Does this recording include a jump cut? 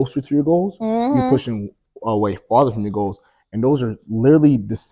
no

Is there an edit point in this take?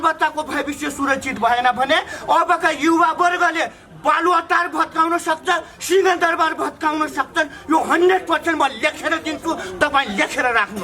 no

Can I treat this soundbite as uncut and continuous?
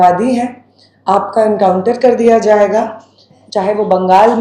no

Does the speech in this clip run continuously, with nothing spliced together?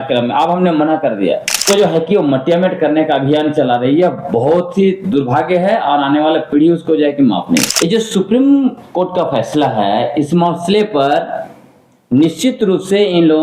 no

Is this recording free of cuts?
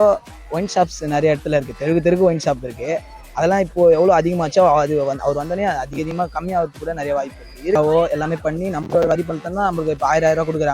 no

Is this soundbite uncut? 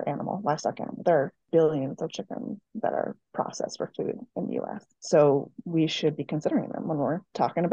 no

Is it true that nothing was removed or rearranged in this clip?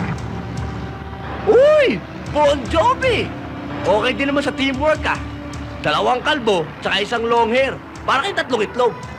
yes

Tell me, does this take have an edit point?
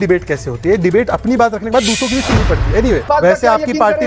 yes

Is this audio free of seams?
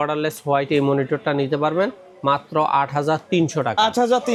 yes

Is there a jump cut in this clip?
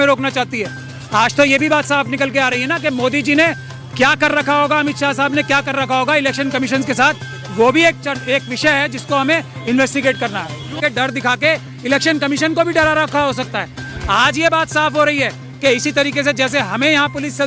yes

